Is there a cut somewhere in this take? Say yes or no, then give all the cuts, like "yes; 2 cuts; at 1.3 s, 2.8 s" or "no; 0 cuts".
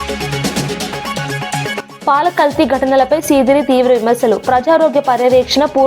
yes; 2 cuts; at 1.1 s, 1.9 s